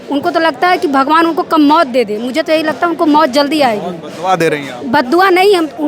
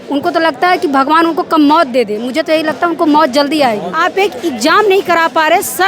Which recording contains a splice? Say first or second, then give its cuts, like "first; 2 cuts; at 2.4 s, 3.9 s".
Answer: second; 1 cut; at 3.9 s